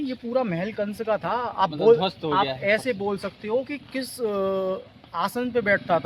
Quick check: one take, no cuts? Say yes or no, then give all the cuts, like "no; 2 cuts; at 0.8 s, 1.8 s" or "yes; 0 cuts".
yes; 0 cuts